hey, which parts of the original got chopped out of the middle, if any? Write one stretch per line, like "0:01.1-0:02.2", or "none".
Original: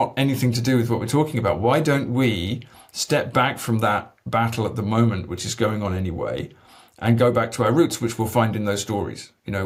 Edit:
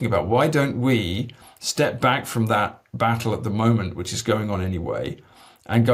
none